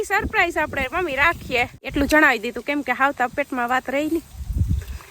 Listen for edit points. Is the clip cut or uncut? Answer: cut